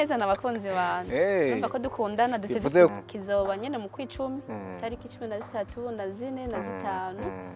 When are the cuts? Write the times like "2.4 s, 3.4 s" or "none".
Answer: 2.9 s